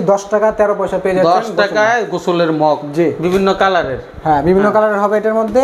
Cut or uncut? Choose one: uncut